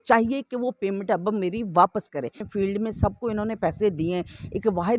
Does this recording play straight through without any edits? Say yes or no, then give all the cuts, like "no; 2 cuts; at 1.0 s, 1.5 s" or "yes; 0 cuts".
no; 1 cut; at 2.4 s